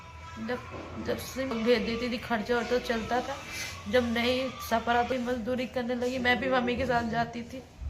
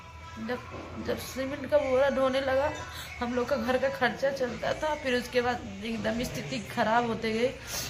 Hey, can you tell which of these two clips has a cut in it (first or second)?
first